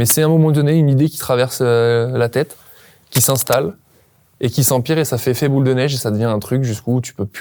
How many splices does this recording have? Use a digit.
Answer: 0